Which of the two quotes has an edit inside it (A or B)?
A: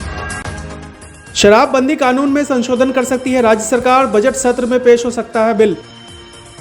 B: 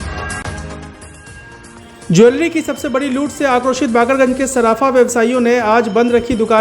B